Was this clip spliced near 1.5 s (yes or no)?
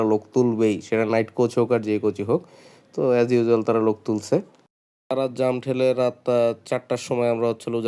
no